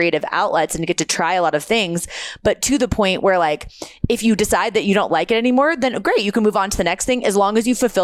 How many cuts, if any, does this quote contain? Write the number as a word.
zero